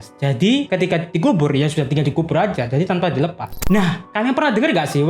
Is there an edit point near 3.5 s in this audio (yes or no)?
yes